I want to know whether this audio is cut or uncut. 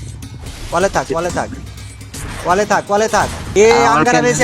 cut